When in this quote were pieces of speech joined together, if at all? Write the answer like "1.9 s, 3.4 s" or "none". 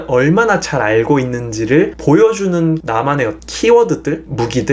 none